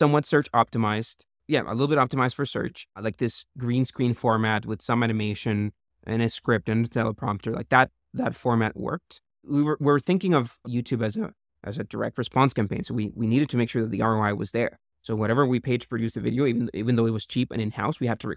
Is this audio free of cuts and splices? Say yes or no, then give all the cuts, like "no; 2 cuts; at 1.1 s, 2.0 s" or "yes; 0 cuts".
yes; 0 cuts